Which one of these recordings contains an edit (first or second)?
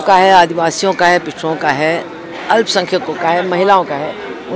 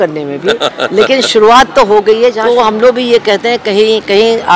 second